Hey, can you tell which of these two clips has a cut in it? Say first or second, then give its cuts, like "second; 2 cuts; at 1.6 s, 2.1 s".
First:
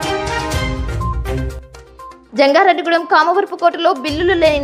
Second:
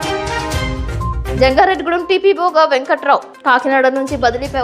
second; 1 cut; at 1.2 s